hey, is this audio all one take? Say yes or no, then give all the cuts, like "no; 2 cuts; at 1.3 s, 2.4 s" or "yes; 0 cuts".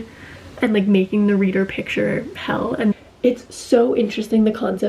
no; 1 cut; at 2.9 s